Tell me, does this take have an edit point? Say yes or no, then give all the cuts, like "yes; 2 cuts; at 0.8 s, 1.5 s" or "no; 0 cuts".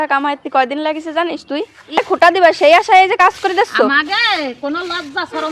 yes; 1 cut; at 2.0 s